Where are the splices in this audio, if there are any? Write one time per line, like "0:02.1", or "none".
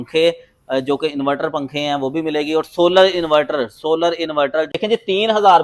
0:04.7